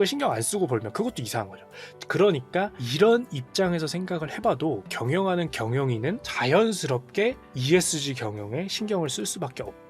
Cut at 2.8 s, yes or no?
yes